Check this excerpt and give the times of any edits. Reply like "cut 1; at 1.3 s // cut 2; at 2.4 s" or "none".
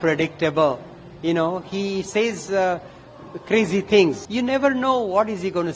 cut 1; at 4.2 s